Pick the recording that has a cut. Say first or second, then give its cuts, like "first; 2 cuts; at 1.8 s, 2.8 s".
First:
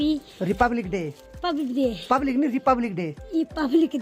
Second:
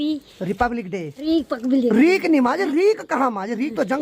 second; 1 cut; at 1.1 s